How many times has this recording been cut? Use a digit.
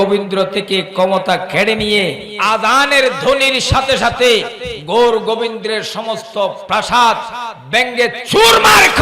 1